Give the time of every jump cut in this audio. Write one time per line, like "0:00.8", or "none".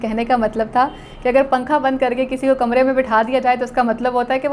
none